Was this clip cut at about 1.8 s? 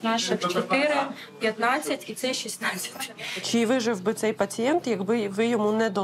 no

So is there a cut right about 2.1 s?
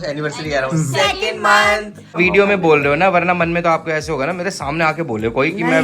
yes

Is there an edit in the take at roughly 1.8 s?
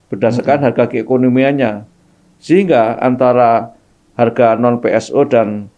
no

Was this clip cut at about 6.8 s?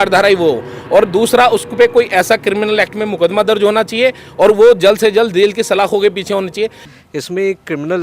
yes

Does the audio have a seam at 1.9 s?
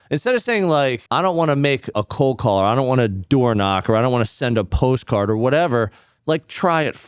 yes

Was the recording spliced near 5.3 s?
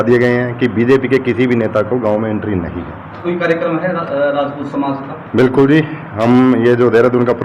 no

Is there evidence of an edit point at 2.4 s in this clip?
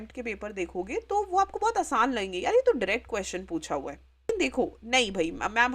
no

